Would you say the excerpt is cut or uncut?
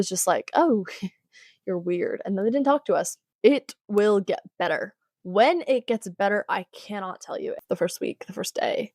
cut